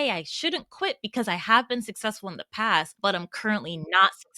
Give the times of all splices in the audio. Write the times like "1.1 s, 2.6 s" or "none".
2.9 s